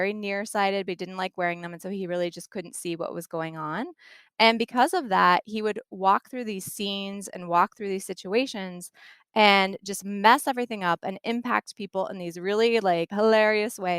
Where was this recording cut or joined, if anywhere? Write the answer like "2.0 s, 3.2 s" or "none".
13.1 s